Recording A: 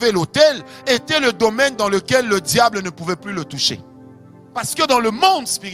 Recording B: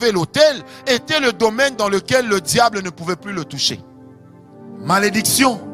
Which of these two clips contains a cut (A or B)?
B